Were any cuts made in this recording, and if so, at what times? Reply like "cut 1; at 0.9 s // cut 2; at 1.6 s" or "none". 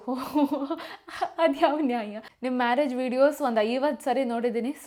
none